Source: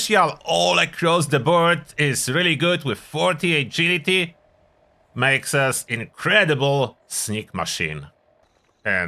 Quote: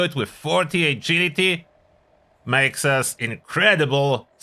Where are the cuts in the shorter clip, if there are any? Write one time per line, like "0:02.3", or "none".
none